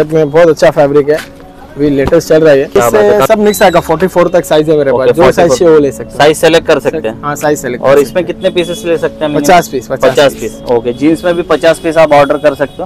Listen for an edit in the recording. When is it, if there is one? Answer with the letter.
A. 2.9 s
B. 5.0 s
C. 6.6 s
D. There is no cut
A